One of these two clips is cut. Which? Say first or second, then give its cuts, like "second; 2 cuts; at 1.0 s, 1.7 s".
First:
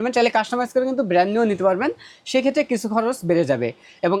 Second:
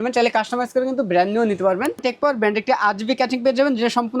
second; 1 cut; at 2.0 s